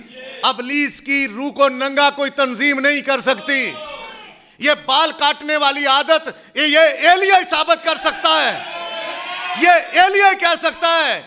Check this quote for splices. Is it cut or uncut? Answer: uncut